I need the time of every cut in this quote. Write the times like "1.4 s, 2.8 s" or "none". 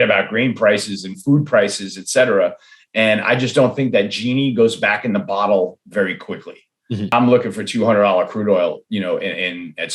7.1 s